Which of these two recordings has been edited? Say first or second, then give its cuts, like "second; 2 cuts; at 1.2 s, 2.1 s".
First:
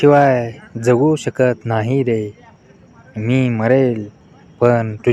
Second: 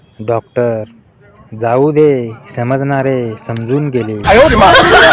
second; 1 cut; at 4.2 s